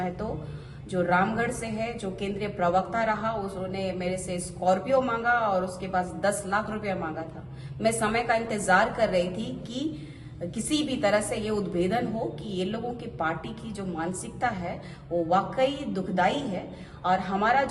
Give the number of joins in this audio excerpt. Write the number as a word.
zero